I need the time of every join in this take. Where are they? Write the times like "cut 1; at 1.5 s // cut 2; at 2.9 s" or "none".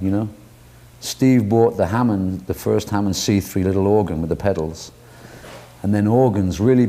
cut 1; at 2.5 s

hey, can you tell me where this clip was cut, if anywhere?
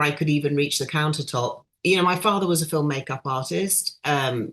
cut 1; at 1.7 s

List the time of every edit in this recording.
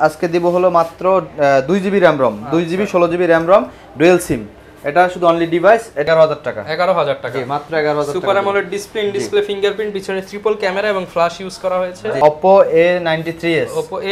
cut 1; at 6.1 s // cut 2; at 12.2 s

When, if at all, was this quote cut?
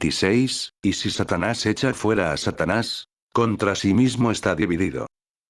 none

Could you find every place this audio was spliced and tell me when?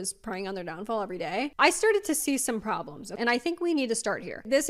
cut 1; at 1.5 s // cut 2; at 3.0 s

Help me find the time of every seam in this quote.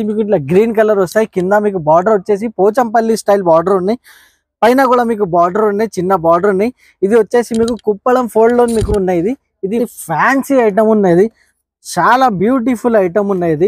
cut 1; at 9.7 s

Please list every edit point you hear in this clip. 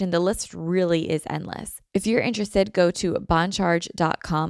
cut 1; at 1.7 s

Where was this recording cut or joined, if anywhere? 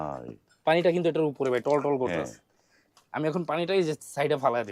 none

